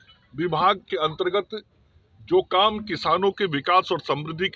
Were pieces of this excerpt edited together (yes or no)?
no